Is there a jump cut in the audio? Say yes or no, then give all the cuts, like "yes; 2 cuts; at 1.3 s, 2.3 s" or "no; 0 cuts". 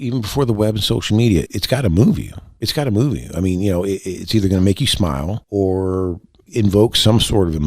yes; 2 cuts; at 1.5 s, 5.4 s